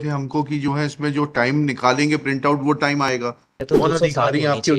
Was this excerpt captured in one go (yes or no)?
no